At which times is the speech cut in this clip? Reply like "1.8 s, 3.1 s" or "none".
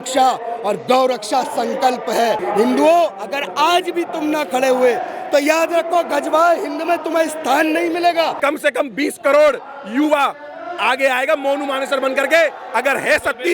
2.4 s, 8.4 s